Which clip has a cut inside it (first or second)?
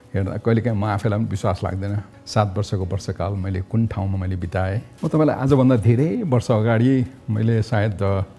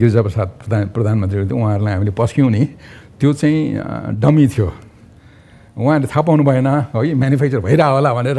first